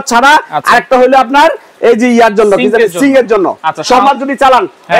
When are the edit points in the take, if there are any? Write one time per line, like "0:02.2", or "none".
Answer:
0:04.0